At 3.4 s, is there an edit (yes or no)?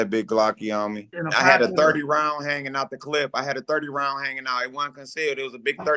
no